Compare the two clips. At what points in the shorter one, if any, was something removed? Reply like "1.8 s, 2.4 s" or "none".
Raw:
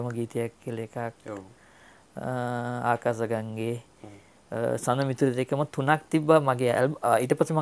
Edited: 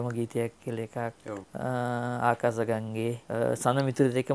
1.5 s, 3.2 s